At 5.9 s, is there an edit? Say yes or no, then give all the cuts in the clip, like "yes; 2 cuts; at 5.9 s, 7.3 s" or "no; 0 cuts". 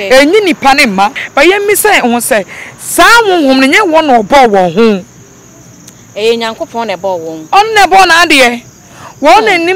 no; 1 cut; at 1.2 s